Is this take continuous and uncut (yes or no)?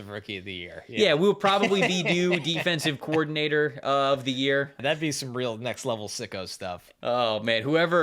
no